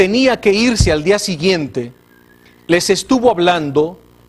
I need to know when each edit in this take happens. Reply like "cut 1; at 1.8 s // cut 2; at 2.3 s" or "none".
none